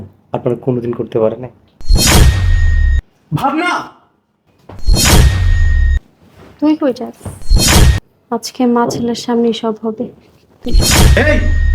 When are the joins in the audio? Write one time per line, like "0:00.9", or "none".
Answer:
0:08.0